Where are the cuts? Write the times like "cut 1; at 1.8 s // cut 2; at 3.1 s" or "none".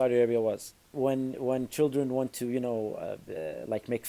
cut 1; at 0.9 s